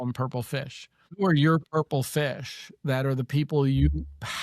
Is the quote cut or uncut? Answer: cut